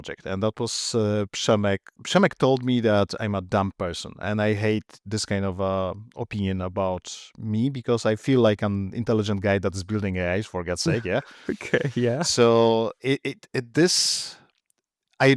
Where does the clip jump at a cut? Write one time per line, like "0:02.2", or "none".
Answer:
0:01.9

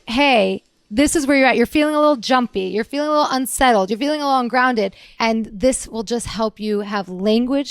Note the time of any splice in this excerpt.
0:05.0

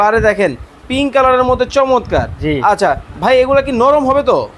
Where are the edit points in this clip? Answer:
none

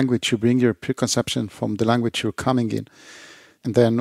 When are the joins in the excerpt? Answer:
none

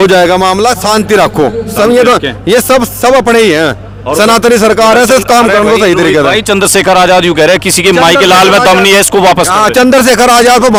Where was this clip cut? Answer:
none

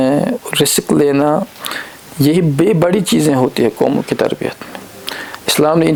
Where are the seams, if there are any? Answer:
none

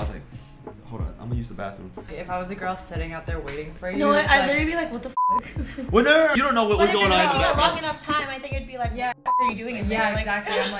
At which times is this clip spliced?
0:02.1
0:06.3

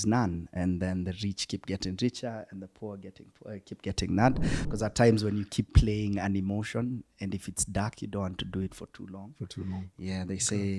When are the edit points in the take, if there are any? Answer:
0:04.6

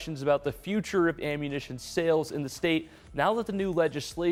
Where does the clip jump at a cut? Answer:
none

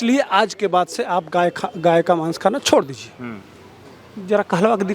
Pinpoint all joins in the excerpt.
none

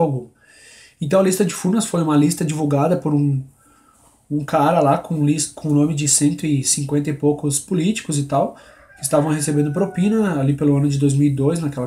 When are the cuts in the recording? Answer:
0:06.5

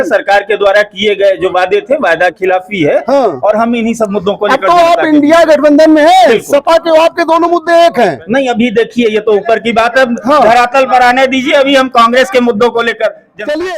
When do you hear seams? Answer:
none

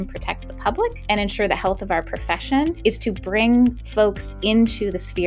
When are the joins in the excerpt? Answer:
0:01.0
0:02.8

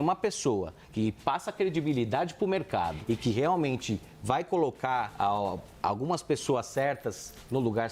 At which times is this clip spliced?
0:03.0
0:05.1

